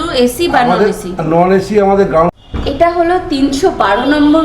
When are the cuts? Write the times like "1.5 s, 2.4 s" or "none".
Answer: 2.3 s